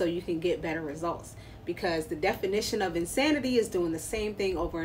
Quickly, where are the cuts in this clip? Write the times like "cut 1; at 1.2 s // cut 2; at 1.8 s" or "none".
none